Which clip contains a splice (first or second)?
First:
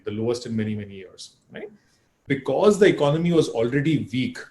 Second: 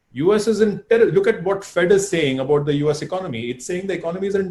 first